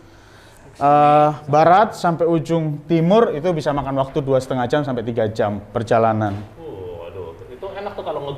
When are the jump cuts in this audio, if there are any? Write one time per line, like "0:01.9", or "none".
none